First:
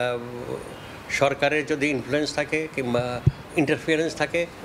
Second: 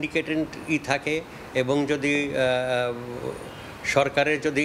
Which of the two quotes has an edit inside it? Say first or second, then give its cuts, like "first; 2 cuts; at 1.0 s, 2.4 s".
first; 1 cut; at 3.4 s